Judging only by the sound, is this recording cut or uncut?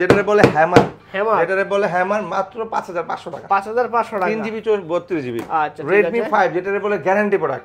uncut